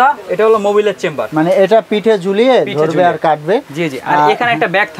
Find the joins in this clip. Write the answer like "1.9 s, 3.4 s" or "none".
1.2 s